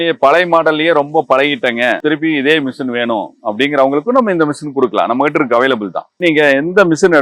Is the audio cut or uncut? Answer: cut